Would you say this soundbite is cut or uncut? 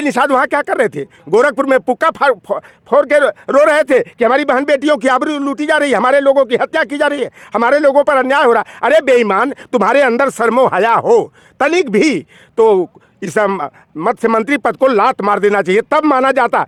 uncut